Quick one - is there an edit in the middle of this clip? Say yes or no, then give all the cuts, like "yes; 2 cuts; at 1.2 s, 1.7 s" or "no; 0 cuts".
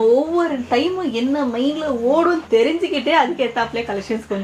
no; 0 cuts